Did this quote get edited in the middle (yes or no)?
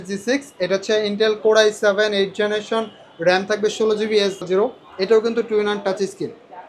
yes